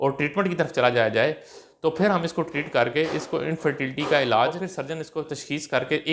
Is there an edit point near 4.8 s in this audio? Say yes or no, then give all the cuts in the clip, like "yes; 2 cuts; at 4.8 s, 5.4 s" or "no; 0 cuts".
yes; 1 cut; at 4.8 s